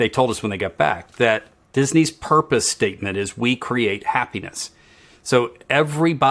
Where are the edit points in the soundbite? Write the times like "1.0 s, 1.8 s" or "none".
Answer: 1.6 s